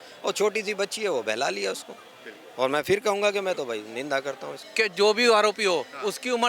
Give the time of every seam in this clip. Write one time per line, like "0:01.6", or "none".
0:04.6